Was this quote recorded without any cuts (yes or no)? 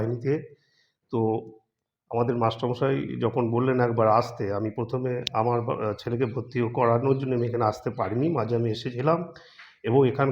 yes